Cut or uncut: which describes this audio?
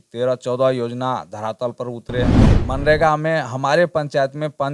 cut